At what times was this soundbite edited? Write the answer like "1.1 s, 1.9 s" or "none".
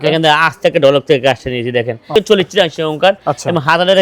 2.0 s

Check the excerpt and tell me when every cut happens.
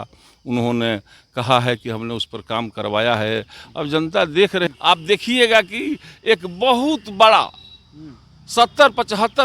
4.7 s

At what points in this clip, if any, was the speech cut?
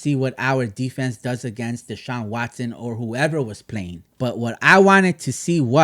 4.0 s

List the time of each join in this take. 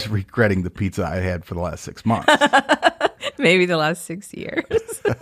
none

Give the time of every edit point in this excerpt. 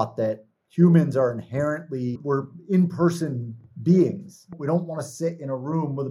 4.5 s

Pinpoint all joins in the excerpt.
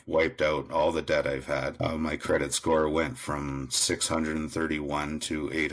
1.7 s

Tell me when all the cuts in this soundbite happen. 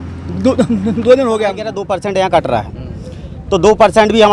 1.7 s

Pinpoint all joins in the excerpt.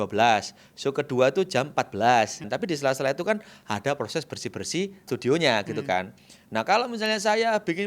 2.4 s, 5.1 s

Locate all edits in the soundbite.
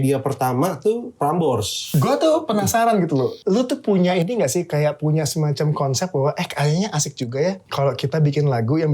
1.6 s, 3.4 s, 7.6 s

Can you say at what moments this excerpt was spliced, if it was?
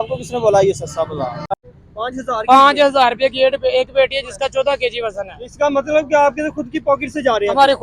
1.5 s

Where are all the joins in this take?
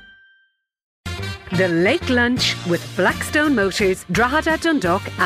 1.0 s

